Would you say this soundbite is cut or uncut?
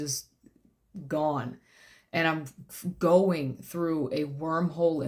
uncut